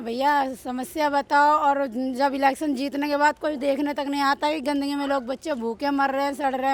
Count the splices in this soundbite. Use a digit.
0